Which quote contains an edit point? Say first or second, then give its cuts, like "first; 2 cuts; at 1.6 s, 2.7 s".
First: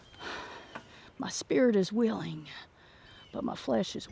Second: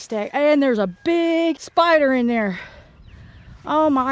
second; 1 cut; at 1.6 s